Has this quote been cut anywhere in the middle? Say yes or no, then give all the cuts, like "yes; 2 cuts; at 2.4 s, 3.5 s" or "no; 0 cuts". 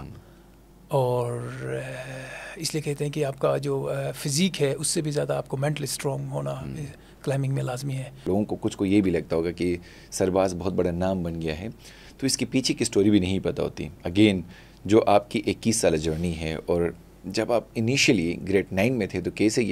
yes; 1 cut; at 8.2 s